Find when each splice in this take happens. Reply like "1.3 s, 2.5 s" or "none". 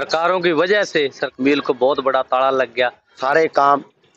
1.2 s, 3.2 s